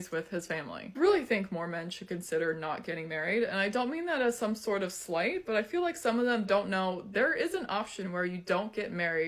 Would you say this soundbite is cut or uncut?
cut